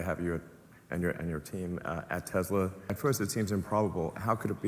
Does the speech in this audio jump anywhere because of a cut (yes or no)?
yes